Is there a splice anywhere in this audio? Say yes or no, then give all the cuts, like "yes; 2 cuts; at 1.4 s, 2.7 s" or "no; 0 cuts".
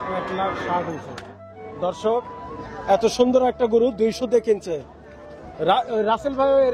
yes; 1 cut; at 1.1 s